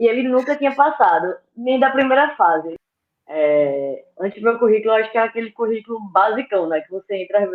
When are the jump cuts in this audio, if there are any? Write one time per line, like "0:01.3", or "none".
0:02.7